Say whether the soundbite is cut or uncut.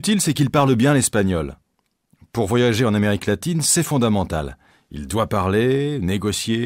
uncut